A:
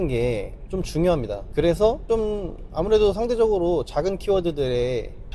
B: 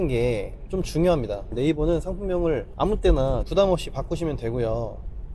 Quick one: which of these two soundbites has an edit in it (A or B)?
B